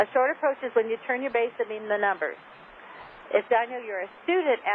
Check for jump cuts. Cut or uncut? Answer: cut